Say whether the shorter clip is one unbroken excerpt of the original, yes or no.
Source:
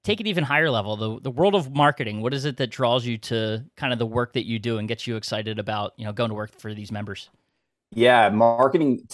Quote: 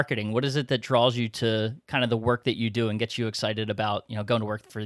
yes